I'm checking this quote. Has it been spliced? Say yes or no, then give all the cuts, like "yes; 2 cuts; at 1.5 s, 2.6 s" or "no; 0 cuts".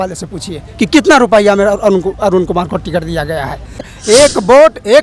yes; 1 cut; at 3.9 s